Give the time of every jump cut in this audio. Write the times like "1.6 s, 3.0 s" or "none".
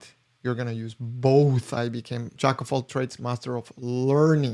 2.2 s